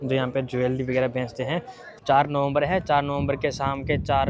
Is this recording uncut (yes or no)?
no